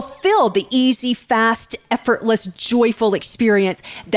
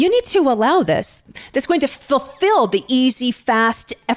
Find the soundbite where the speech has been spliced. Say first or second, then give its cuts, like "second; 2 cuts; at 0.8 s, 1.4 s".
second; 1 cut; at 1.2 s